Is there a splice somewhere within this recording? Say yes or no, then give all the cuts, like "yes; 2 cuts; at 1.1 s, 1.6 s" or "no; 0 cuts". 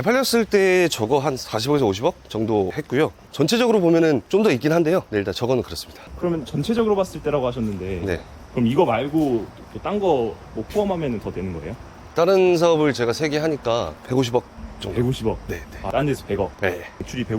no; 0 cuts